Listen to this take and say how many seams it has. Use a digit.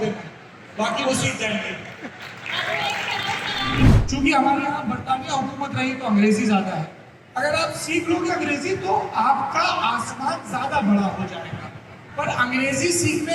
1